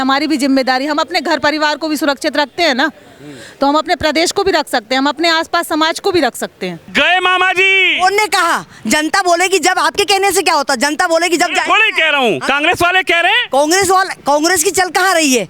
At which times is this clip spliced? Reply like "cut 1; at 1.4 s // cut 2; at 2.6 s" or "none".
cut 1; at 6.9 s